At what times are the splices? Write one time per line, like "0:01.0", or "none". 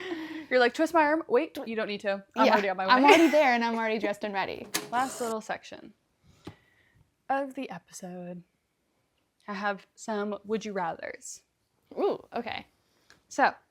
0:04.7